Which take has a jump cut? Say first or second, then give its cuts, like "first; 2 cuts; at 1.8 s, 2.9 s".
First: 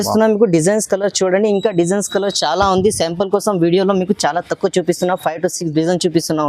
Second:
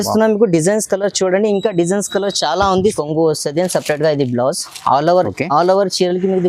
second; 1 cut; at 2.9 s